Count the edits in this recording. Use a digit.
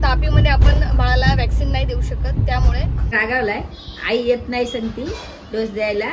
1